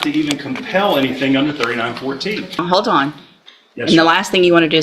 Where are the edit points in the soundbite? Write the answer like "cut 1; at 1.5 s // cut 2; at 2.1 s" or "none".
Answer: cut 1; at 2.6 s